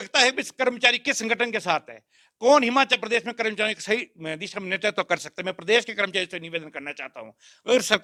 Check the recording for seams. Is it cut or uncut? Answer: uncut